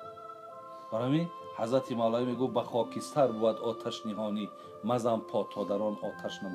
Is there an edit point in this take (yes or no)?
yes